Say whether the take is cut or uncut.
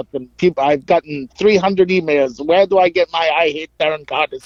uncut